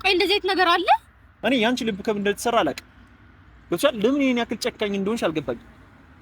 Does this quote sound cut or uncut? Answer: cut